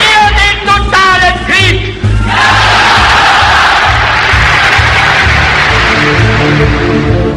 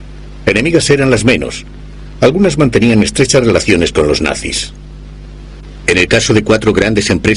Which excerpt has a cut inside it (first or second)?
first